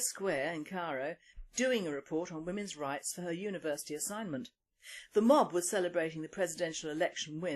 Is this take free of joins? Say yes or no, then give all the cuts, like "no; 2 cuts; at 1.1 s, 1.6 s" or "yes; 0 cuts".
no; 1 cut; at 6.0 s